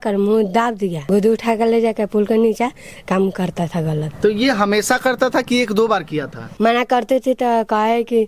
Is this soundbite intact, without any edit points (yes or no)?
no